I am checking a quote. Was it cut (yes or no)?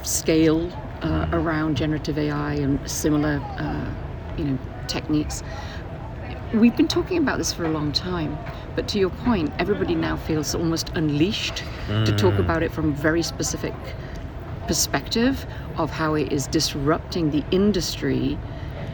no